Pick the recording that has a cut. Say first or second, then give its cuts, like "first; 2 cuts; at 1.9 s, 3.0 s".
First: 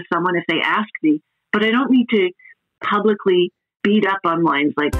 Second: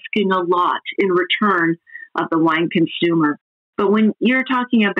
first; 1 cut; at 3.7 s